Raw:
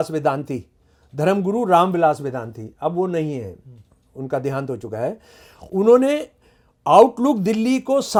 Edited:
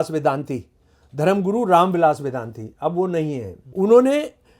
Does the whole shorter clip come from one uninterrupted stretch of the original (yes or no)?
no